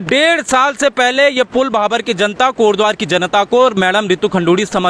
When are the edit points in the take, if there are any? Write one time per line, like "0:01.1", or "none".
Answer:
none

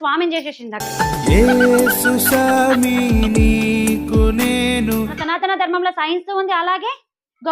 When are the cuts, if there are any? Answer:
0:05.2

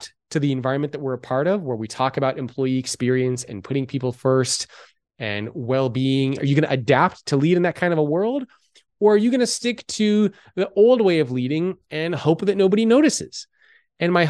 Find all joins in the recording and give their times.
0:06.4

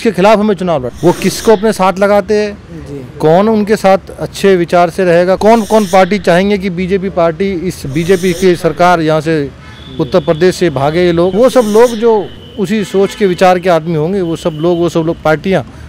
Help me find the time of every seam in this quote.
0:00.9
0:05.4
0:11.3

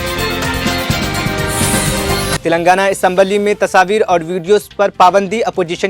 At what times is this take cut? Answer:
0:02.4

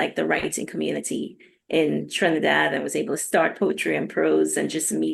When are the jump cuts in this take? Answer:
none

